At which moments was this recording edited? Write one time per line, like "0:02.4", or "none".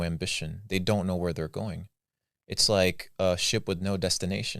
none